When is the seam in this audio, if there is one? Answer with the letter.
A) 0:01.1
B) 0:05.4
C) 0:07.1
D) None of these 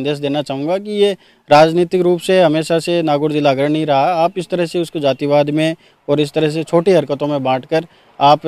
D